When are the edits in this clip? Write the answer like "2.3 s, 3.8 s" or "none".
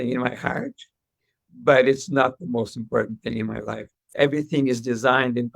4.2 s

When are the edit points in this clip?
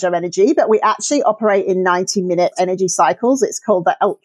2.5 s

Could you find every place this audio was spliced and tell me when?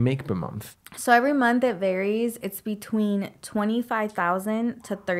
none

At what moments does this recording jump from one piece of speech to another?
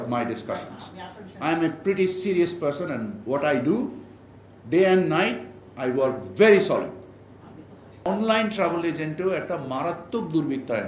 8.1 s

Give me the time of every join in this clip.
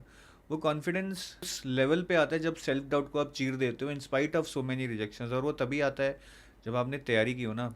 1.5 s

